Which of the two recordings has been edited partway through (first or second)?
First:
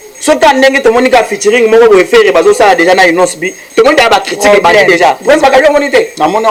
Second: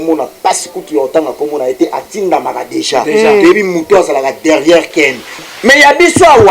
second